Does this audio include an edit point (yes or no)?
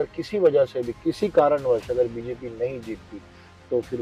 no